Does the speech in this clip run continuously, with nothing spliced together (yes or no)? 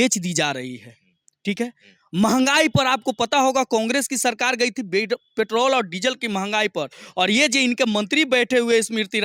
yes